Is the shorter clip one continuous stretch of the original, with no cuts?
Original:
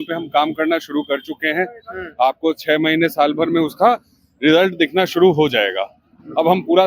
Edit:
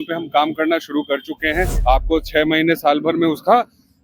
no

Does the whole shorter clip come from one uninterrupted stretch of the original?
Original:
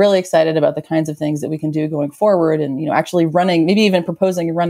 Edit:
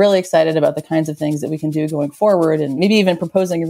no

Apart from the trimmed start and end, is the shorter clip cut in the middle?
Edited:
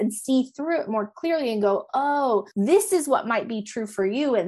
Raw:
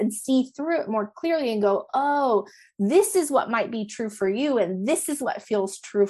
yes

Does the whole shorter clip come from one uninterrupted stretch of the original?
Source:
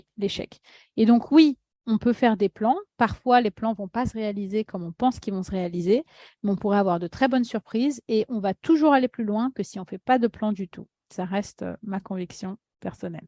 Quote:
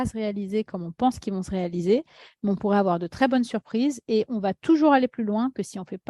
yes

